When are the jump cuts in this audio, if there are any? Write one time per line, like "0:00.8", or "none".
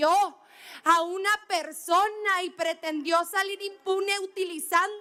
none